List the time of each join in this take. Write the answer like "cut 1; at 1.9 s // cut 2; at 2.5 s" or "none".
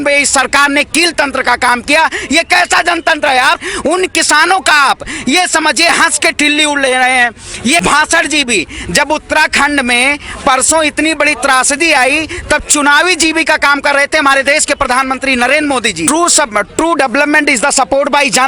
cut 1; at 3.6 s // cut 2; at 7.8 s // cut 3; at 16.1 s